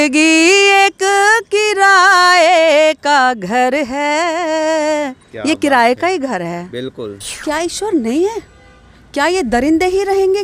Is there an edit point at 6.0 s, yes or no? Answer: no